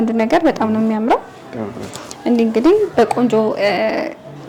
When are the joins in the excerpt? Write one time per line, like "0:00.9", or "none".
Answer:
none